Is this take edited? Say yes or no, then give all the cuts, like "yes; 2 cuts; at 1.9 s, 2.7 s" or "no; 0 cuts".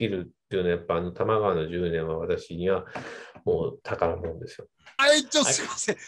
no; 0 cuts